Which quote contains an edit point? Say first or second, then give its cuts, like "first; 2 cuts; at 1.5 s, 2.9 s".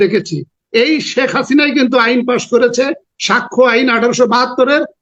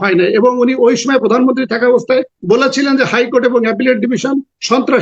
second; 1 cut; at 2.3 s